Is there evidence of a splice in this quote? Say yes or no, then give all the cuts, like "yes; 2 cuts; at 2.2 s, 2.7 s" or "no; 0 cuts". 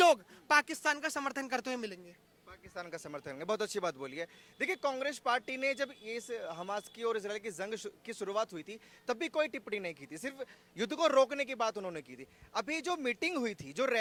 no; 0 cuts